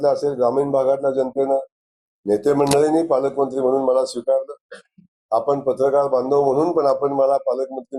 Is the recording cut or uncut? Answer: uncut